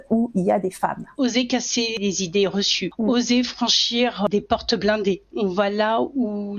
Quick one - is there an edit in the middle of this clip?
yes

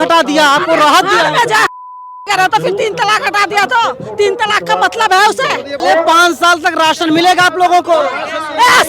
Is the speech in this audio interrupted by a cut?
yes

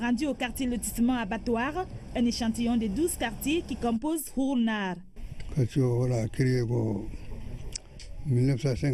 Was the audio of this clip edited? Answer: no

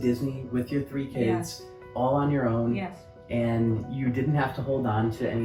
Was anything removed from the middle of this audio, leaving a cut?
no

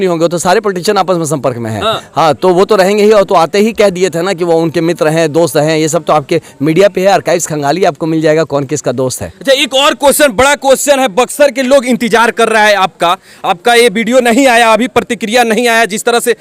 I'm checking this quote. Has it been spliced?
no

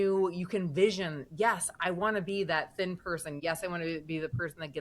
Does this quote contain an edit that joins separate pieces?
yes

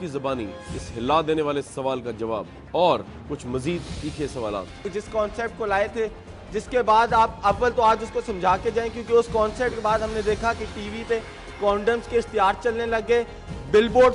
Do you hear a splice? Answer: no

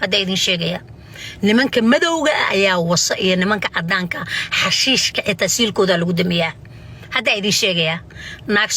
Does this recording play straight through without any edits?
yes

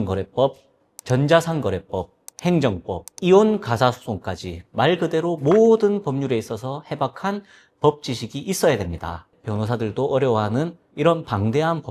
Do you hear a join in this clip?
yes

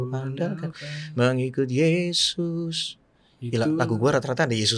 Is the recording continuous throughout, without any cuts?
yes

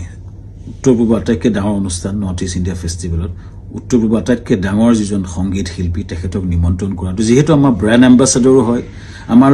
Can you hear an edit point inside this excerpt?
no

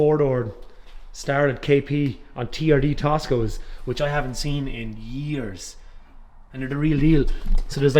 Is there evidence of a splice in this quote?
no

